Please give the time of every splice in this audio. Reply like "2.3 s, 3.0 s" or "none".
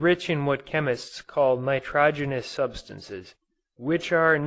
3.2 s